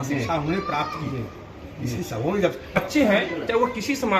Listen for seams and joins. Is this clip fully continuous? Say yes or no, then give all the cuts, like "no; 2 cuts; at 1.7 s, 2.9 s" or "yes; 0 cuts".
no; 1 cut; at 2.8 s